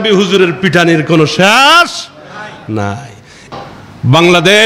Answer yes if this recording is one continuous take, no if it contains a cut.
no